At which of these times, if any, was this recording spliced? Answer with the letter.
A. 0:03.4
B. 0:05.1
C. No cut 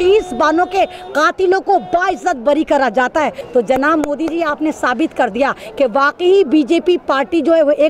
A